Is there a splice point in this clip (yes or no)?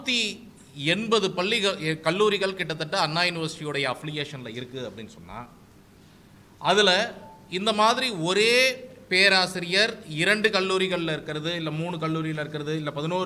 no